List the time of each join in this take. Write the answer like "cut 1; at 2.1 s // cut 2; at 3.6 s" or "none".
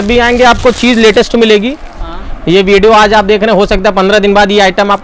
none